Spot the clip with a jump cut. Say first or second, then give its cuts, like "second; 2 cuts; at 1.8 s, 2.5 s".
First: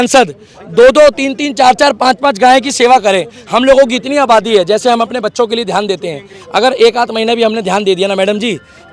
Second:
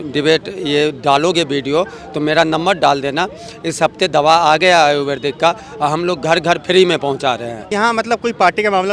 second; 1 cut; at 7.6 s